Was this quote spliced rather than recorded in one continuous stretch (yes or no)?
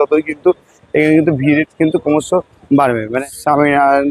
yes